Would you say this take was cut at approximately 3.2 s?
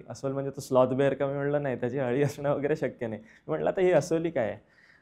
no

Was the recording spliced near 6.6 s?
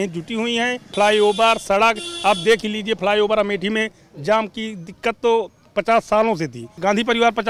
yes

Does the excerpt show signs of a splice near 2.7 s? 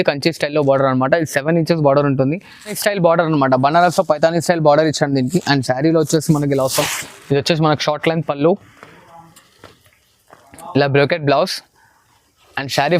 yes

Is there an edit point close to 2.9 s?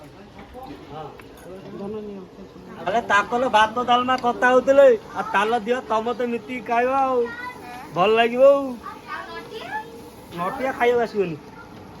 yes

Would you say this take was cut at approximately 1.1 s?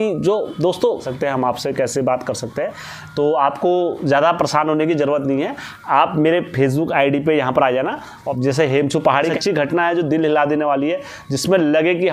yes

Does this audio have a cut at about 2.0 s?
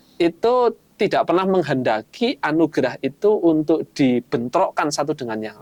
no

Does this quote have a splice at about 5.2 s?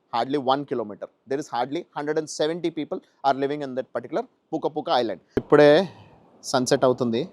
yes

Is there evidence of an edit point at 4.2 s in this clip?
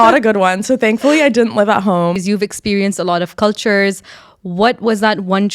no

